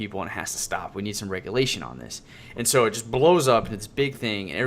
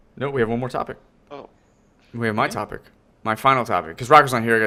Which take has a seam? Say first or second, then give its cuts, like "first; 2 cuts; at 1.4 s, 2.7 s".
first; 1 cut; at 3.6 s